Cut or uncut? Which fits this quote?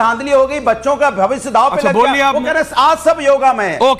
uncut